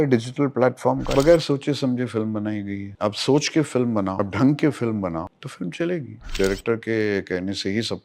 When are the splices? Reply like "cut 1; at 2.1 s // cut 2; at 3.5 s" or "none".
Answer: cut 1; at 1.1 s // cut 2; at 2.9 s // cut 3; at 4.1 s // cut 4; at 5.4 s // cut 5; at 6.4 s